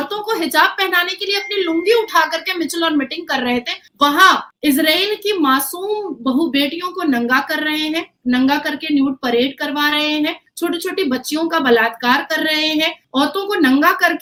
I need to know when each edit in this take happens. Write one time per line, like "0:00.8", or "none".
none